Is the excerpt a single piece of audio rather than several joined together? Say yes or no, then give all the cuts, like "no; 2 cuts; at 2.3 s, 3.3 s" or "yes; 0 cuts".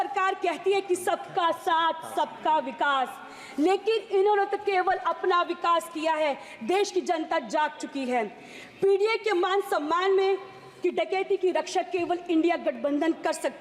yes; 0 cuts